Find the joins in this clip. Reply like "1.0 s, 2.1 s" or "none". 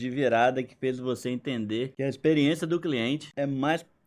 1.9 s, 3.3 s